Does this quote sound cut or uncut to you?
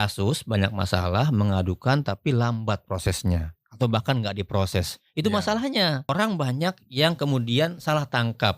cut